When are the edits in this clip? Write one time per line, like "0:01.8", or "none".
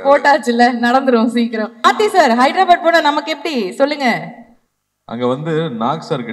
0:01.8